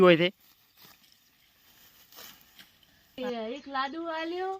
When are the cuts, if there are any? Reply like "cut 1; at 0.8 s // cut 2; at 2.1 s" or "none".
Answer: cut 1; at 3.2 s